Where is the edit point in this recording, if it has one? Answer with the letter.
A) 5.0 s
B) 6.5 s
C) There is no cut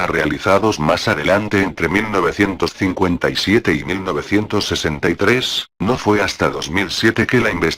A